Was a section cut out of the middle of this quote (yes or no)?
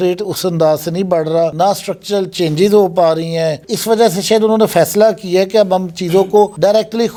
no